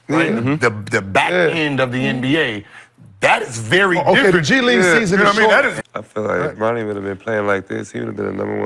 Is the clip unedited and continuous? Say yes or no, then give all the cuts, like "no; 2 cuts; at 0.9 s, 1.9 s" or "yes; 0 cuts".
no; 1 cut; at 5.8 s